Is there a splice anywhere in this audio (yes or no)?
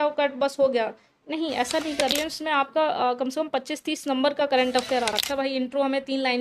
yes